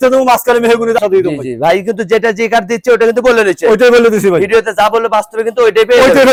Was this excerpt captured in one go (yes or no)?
yes